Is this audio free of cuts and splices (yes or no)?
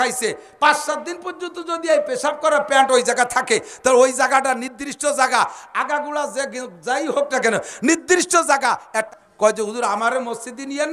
no